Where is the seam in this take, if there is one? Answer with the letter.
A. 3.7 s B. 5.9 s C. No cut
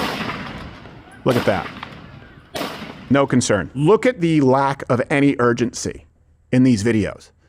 A